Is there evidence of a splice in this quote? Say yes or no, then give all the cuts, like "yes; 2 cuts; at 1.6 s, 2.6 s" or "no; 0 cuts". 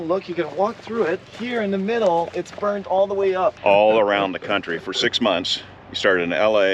yes; 2 cuts; at 1.3 s, 3.6 s